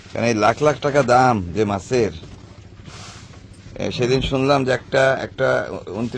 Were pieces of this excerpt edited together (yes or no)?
no